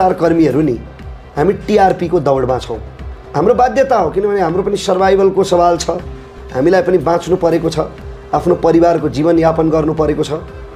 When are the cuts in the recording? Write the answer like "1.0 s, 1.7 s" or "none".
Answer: none

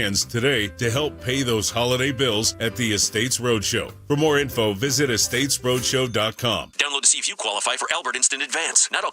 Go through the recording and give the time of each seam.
6.8 s

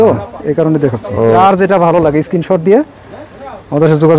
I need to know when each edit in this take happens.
1.4 s

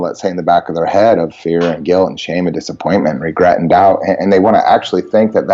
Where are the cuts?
none

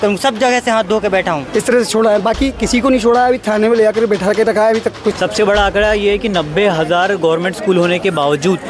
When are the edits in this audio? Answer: 1.4 s, 5.2 s

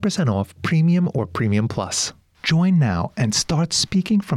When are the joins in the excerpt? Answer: none

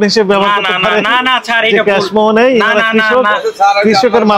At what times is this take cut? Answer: none

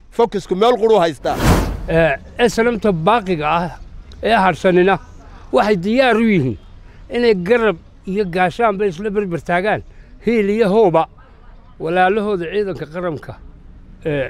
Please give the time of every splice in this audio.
1.5 s

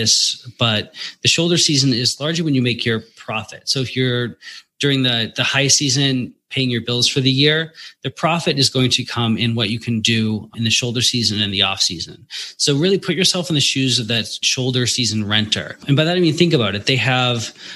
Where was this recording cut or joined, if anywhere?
6.4 s, 10.5 s, 14.4 s, 15.8 s

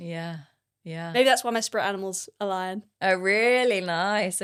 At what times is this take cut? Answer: none

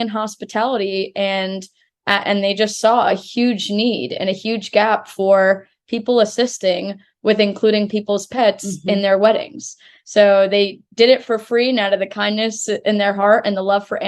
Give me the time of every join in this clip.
none

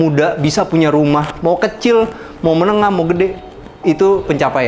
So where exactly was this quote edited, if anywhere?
none

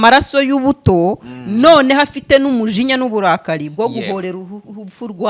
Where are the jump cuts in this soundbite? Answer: none

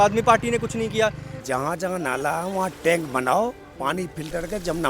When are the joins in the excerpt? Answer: 1.3 s

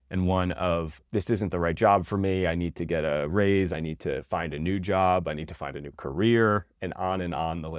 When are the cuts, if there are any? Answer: 3.7 s

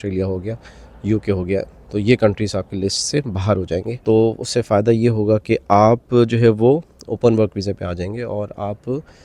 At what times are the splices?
3.9 s

